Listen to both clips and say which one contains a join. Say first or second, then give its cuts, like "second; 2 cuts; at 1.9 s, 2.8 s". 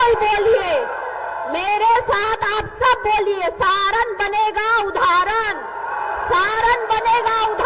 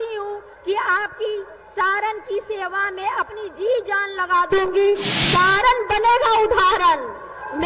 second; 1 cut; at 5.1 s